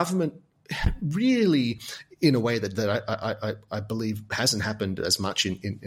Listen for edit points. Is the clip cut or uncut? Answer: uncut